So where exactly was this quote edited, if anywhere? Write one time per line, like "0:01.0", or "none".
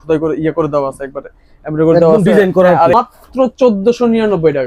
0:02.9

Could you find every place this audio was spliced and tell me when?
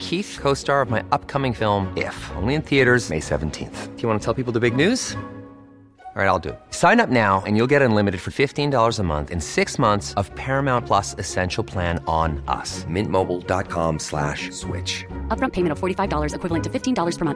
none

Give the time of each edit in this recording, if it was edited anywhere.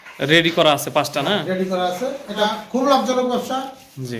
0:02.4

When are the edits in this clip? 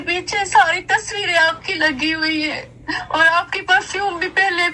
none

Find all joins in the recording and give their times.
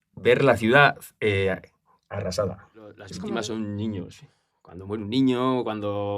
0:03.0

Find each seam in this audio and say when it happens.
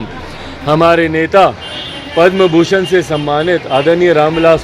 none

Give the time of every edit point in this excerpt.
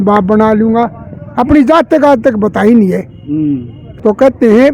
0:03.8

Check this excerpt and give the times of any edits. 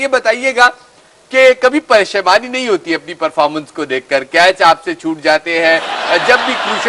0:04.5

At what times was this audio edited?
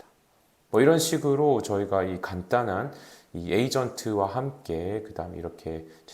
none

